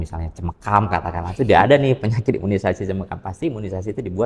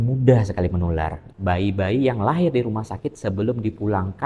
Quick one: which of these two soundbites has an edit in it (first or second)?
second